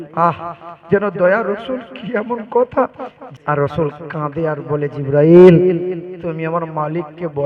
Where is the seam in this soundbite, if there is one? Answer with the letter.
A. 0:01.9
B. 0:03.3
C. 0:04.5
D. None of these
B